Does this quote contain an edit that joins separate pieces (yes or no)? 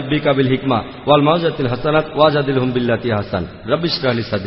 yes